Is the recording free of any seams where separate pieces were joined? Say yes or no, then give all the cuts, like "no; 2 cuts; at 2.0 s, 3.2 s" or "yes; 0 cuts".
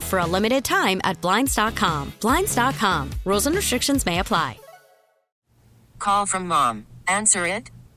no; 1 cut; at 5.4 s